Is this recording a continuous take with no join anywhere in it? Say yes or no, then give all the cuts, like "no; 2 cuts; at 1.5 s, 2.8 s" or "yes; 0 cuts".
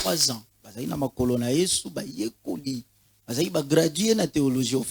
yes; 0 cuts